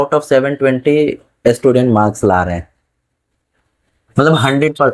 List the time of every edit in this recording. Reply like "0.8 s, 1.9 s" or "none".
none